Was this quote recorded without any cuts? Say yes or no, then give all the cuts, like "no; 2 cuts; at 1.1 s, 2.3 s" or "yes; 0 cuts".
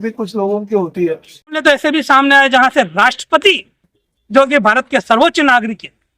no; 1 cut; at 1.6 s